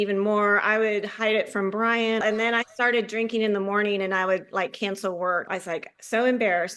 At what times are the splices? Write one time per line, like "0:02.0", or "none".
0:02.2
0:05.5